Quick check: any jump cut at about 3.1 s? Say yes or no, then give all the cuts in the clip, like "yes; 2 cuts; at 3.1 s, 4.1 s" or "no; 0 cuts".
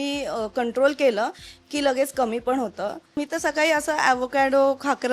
yes; 1 cut; at 3.1 s